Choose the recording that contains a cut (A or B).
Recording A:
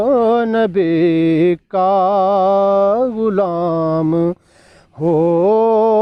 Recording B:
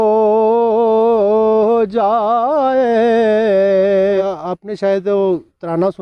B